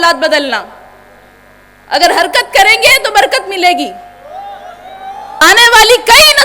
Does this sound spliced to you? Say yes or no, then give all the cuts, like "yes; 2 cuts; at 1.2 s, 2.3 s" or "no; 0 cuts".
yes; 1 cut; at 5.4 s